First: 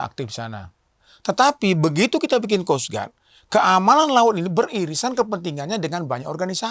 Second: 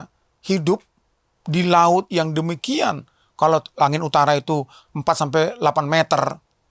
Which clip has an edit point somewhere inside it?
first; 1 cut; at 1.1 s

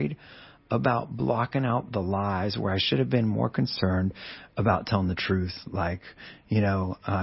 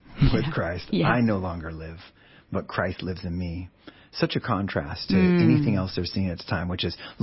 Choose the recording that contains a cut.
first; 1 cut; at 5.2 s

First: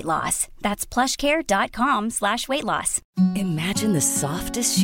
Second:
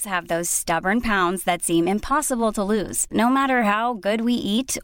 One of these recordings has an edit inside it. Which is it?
first; 1 cut; at 3.0 s

